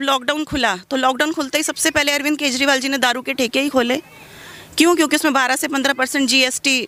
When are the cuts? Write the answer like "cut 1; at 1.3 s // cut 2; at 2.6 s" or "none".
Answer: none